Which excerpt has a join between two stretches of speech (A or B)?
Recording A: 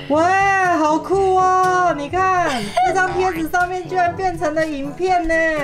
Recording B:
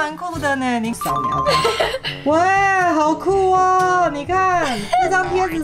B